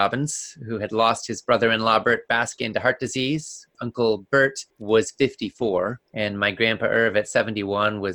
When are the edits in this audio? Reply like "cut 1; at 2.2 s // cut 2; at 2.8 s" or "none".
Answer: cut 1; at 3.7 s // cut 2; at 4.7 s // cut 3; at 6.0 s